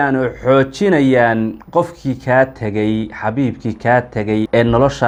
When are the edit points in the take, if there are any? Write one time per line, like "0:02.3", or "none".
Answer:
none